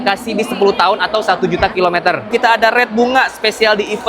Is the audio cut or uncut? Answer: cut